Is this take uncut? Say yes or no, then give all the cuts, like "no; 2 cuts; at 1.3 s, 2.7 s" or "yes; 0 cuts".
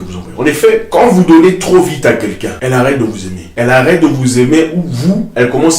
no; 3 cuts; at 0.9 s, 2.5 s, 3.4 s